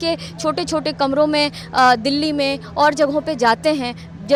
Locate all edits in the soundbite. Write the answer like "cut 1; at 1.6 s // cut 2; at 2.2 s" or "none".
none